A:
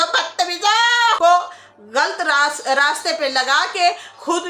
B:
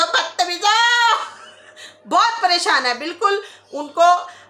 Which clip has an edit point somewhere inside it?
A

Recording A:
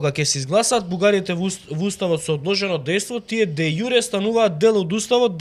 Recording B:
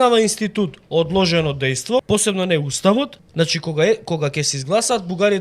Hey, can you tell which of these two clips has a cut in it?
B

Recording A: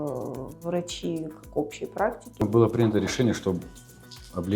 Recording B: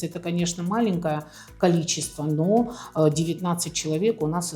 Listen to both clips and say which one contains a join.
A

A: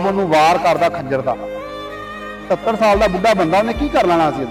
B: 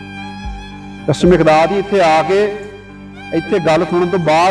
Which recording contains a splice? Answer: B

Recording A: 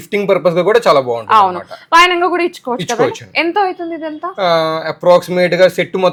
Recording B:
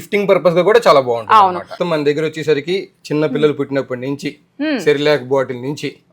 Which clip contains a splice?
B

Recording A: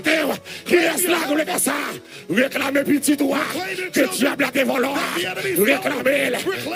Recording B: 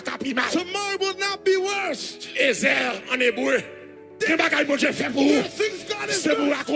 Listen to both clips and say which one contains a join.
B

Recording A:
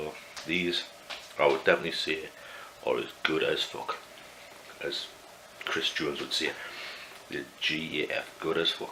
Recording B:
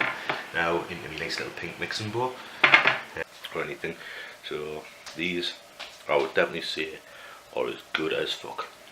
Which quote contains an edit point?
B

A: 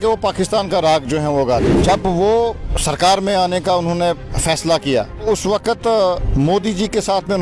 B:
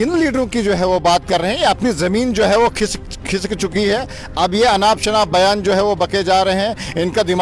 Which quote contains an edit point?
A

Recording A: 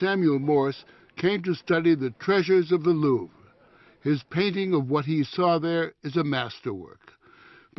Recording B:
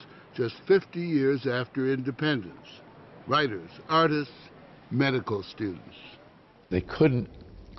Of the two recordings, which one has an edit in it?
B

